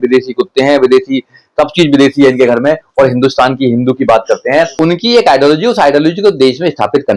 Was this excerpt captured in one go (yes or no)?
no